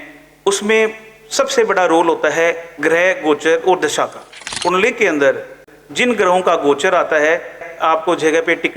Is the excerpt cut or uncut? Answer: cut